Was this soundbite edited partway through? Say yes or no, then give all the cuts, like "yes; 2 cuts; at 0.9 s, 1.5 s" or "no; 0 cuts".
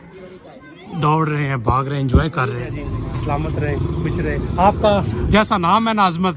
yes; 1 cut; at 2.8 s